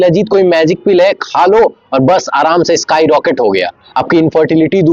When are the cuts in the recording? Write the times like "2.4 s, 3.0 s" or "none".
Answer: none